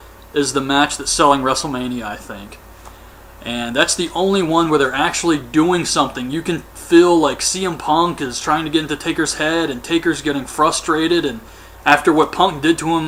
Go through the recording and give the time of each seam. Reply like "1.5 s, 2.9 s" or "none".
none

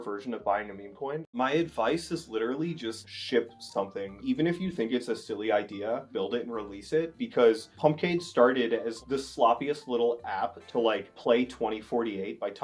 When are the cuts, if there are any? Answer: 1.2 s

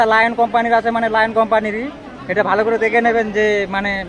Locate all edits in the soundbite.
none

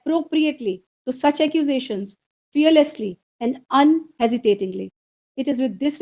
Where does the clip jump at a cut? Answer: none

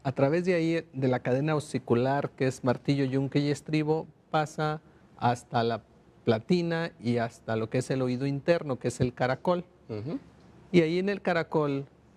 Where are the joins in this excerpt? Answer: none

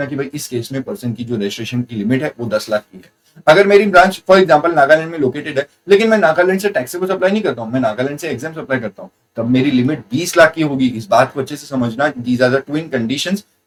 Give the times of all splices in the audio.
none

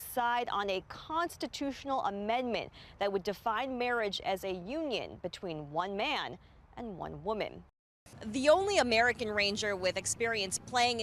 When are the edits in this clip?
8.0 s

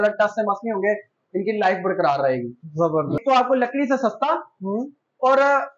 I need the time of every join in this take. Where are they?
3.2 s

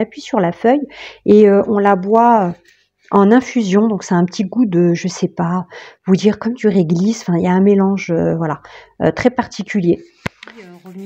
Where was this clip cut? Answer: none

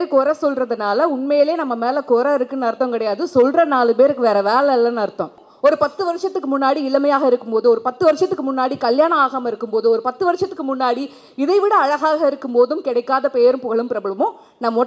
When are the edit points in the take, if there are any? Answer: 5.4 s

